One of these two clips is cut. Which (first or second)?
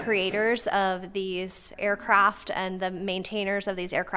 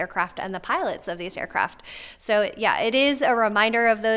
first